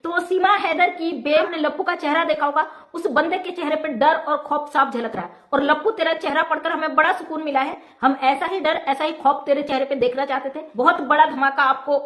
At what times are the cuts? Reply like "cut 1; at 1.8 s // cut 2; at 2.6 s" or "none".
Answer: cut 1; at 1.5 s // cut 2; at 10.6 s